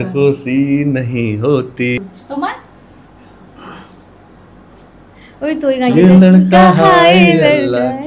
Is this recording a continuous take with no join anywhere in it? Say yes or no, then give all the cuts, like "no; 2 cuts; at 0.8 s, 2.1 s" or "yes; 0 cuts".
yes; 0 cuts